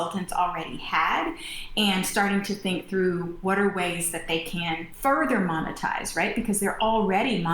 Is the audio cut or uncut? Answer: cut